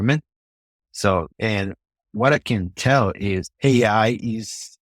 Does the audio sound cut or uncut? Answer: cut